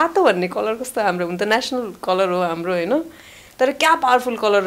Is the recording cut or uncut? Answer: uncut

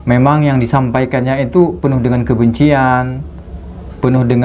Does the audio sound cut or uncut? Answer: uncut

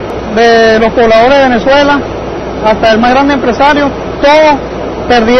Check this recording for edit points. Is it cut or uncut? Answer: cut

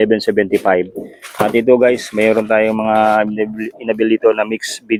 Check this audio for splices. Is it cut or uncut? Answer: uncut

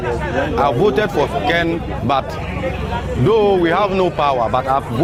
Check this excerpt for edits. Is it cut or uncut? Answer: uncut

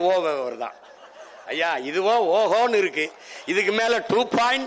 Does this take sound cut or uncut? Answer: uncut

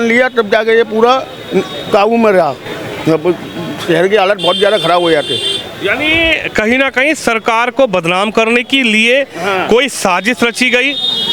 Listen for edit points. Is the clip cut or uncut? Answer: uncut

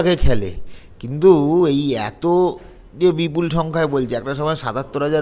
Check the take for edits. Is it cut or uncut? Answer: uncut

